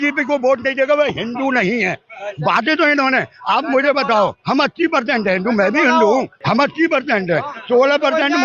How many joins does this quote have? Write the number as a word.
one